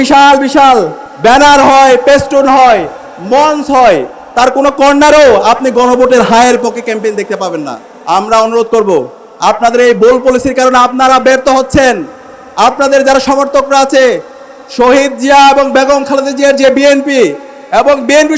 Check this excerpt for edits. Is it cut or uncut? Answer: cut